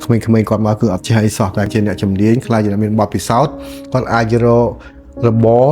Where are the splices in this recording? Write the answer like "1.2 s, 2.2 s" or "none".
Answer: 1.7 s